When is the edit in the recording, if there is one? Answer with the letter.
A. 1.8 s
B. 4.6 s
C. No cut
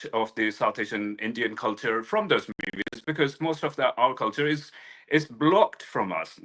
C